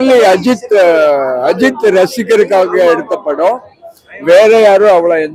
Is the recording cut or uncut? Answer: uncut